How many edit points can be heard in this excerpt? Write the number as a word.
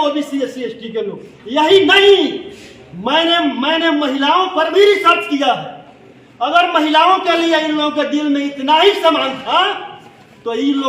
zero